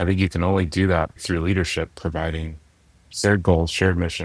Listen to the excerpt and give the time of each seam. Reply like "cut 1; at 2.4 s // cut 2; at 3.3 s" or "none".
cut 1; at 1.2 s